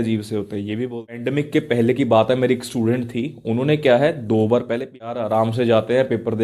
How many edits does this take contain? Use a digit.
2